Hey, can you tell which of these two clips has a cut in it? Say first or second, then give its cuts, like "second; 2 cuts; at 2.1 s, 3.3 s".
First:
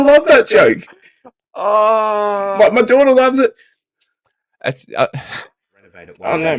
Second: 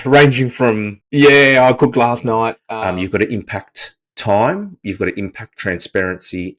second; 2 cuts; at 0.9 s, 2.6 s